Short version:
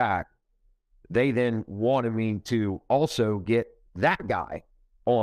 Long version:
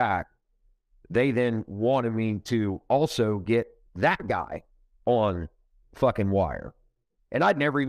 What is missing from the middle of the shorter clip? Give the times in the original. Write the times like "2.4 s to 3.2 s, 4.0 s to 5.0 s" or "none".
none